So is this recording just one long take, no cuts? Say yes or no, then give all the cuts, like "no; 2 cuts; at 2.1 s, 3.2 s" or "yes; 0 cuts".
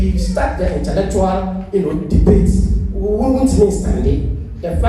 yes; 0 cuts